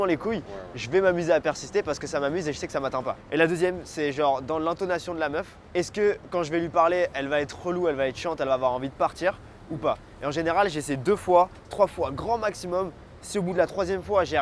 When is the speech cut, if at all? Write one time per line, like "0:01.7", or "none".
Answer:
none